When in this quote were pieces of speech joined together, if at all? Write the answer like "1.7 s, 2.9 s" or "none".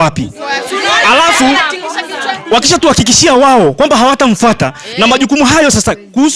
none